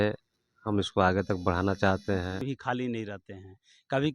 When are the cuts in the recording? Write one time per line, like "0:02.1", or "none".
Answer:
0:02.5

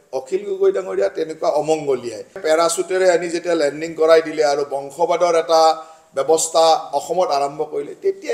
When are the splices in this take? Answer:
0:02.4

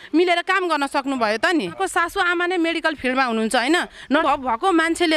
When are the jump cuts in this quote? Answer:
0:01.7
0:04.2

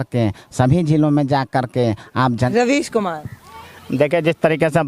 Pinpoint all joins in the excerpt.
0:02.5

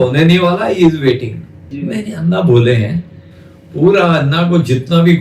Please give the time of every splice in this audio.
0:01.7

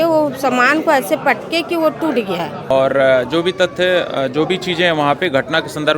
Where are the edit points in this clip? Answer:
0:02.6

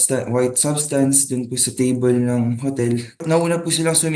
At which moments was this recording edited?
0:03.2

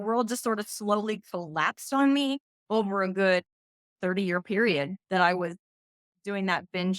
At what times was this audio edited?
0:02.5
0:03.9

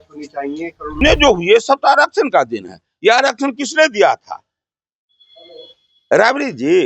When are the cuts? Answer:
0:01.0

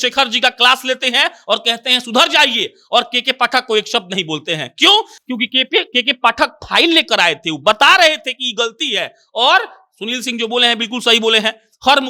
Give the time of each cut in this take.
none

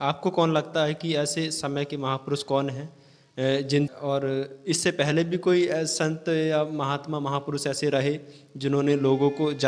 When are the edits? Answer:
0:03.9

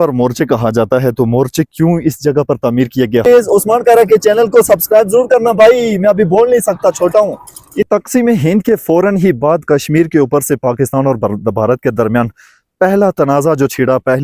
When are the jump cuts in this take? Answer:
0:03.3
0:07.9

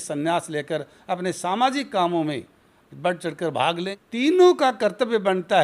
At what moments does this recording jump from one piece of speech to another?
0:03.9

